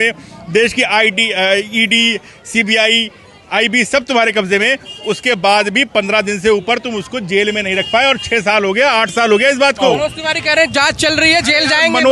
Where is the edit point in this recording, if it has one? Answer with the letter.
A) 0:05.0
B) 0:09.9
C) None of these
B